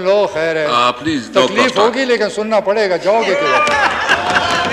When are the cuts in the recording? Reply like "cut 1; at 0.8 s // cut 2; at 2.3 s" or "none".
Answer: none